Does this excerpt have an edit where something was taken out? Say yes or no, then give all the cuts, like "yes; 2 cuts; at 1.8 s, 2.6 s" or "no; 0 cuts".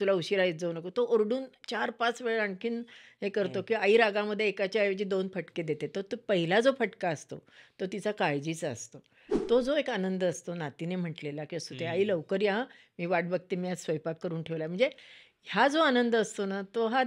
yes; 1 cut; at 9.4 s